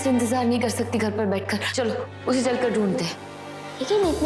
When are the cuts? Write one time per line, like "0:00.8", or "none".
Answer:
none